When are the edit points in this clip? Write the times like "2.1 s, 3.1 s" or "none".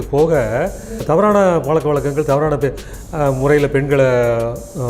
1.0 s